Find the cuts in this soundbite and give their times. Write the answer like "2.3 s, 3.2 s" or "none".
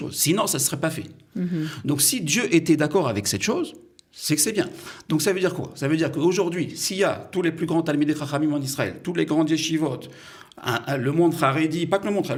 none